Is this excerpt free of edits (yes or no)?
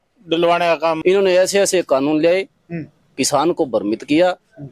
no